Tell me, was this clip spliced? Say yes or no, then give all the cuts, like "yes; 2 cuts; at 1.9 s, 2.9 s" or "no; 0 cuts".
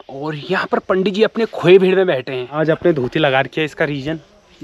yes; 1 cut; at 2.6 s